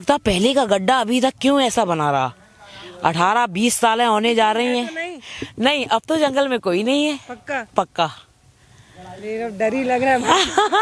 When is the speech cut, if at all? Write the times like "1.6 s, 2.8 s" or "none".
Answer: none